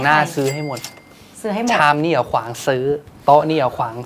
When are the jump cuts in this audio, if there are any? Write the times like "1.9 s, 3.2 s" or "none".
none